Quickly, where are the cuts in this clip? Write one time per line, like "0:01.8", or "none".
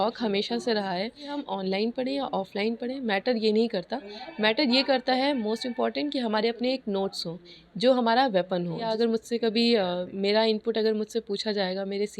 0:01.4
0:08.9

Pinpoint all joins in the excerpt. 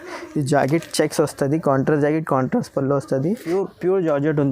0:03.4

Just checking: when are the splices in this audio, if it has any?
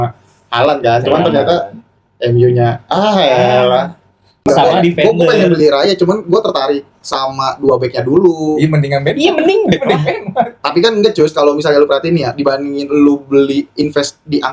0:04.4

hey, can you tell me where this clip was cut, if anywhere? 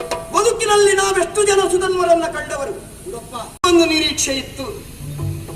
0:03.6

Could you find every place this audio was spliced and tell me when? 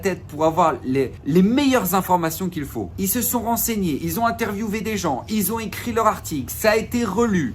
0:01.2
0:02.8

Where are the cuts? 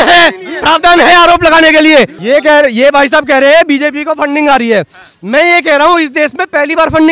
none

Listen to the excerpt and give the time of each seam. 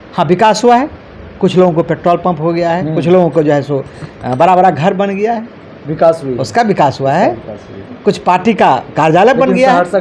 none

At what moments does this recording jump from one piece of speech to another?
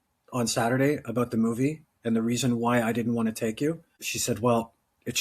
0:04.1

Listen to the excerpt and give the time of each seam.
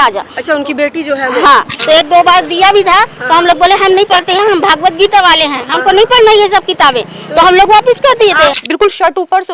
0:01.7
0:08.6

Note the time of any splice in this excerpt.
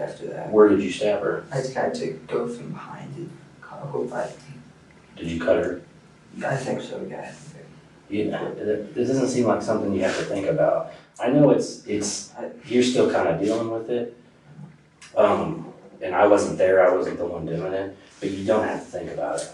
none

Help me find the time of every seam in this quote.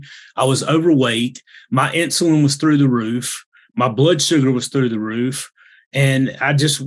none

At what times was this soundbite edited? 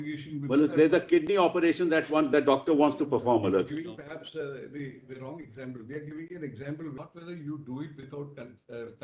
0:07.0

